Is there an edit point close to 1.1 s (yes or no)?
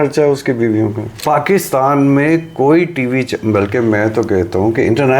yes